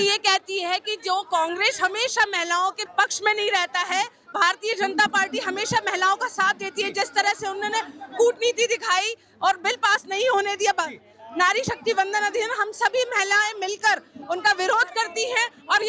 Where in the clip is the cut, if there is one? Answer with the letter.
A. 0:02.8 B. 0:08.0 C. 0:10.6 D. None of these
A